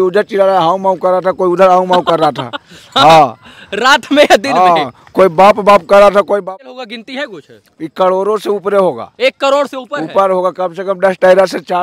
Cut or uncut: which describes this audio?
cut